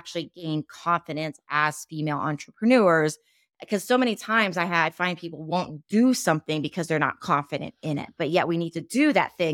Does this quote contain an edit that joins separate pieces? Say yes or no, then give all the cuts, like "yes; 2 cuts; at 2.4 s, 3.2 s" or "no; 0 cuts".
no; 0 cuts